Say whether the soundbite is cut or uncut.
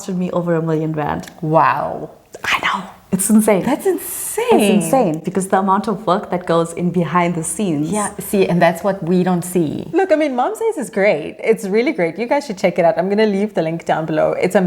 uncut